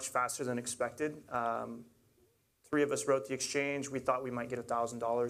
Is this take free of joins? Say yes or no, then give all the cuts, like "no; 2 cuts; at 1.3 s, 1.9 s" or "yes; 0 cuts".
yes; 0 cuts